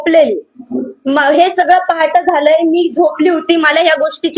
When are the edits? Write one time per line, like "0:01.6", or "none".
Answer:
none